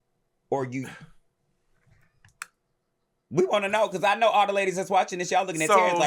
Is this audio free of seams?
yes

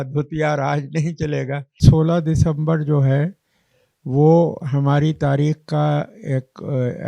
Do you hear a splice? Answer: yes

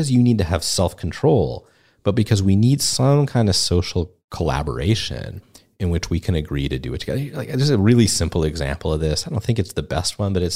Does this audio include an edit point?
no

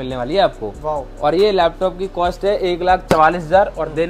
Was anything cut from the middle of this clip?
no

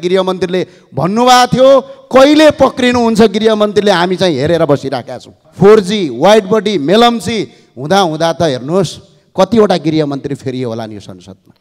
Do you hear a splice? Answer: yes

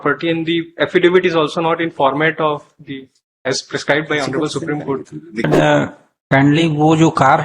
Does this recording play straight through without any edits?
no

